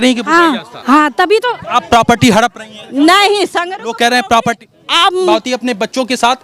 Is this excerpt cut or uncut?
cut